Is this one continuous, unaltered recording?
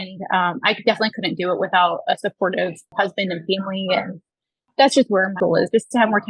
no; 3 cuts; at 2.8 s, 4.7 s, 5.4 s

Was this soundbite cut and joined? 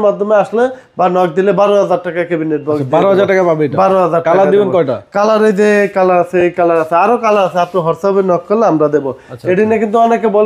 no; 0 cuts

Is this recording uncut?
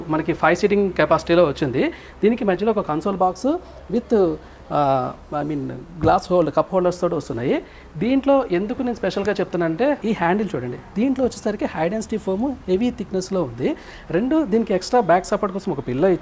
yes; 0 cuts

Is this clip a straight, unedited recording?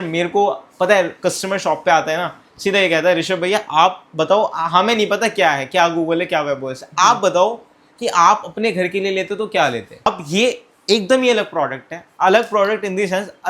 no; 1 cut; at 10.1 s

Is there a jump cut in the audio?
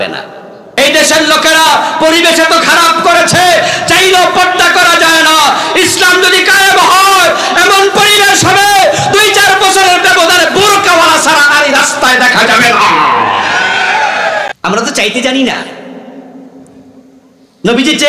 yes; 2 cuts; at 0.8 s, 14.5 s

